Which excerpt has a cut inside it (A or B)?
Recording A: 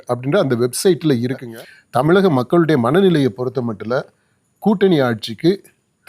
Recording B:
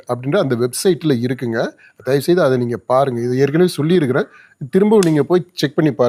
A